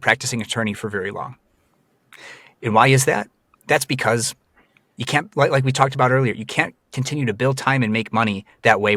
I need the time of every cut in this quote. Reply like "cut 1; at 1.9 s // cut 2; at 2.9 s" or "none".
none